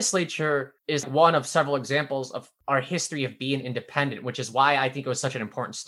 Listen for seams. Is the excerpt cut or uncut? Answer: cut